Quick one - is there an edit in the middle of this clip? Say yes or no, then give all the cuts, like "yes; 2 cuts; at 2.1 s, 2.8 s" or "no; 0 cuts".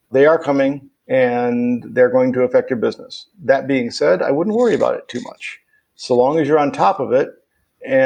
yes; 1 cut; at 0.9 s